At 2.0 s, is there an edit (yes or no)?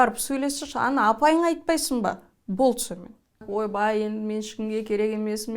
no